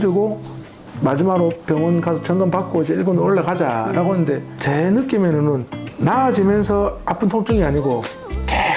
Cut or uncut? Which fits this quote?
uncut